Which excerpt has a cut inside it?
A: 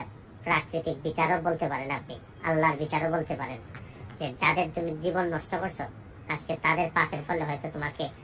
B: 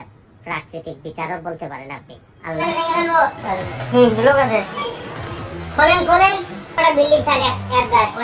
B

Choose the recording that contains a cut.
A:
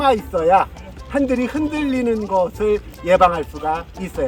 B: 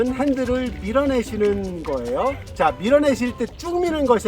B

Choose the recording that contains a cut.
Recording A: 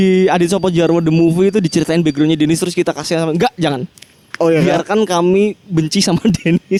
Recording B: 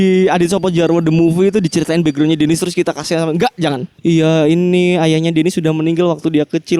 B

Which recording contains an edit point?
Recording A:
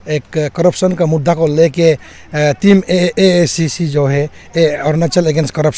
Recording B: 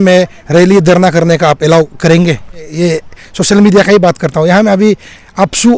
B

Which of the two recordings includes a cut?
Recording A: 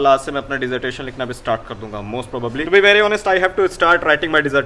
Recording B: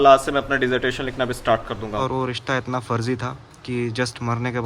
B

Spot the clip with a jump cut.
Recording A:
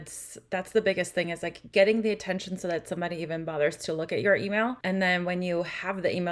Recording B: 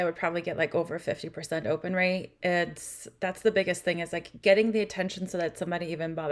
A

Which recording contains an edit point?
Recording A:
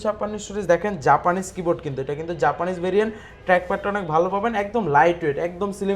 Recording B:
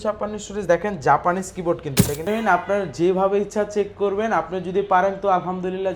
B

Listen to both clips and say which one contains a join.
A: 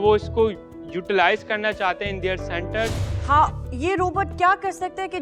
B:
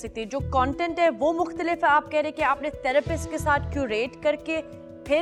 A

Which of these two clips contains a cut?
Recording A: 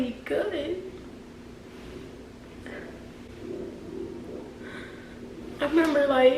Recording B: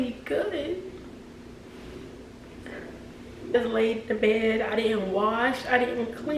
B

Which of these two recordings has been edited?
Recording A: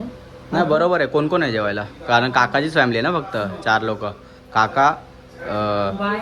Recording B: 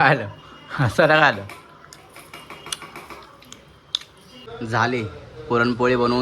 B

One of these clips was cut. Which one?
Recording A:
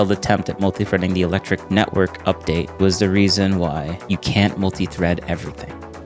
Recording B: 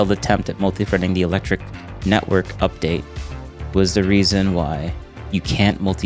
A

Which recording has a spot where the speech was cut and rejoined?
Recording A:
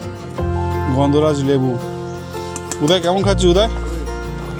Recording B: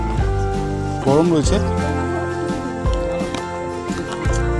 B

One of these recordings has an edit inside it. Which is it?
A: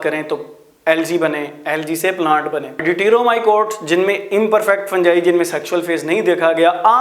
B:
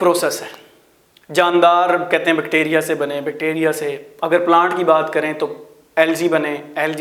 A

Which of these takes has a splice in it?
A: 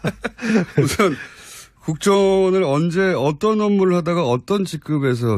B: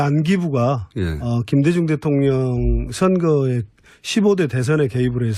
B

